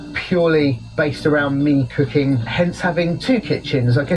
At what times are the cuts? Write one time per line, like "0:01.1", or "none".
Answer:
0:02.5